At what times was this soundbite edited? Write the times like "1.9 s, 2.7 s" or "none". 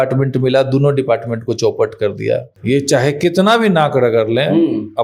2.5 s